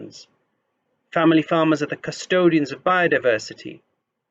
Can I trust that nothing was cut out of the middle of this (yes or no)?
yes